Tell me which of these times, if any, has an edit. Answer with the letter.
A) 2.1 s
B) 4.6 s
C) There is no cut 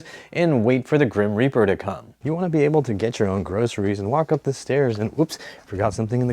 A